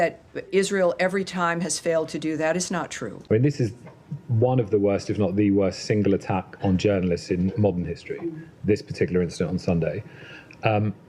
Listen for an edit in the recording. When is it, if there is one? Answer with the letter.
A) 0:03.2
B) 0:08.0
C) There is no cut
A